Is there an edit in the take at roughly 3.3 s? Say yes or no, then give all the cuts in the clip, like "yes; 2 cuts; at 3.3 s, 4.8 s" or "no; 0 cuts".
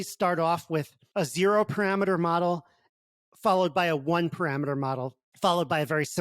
no; 2 cuts; at 1.0 s, 5.2 s